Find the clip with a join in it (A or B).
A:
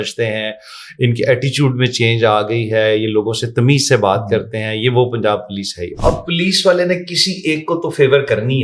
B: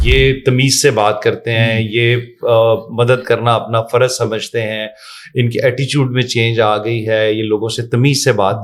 A